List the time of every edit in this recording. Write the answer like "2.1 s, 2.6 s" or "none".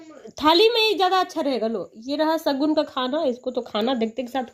none